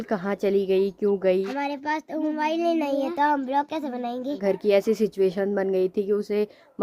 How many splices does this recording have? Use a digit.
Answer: 2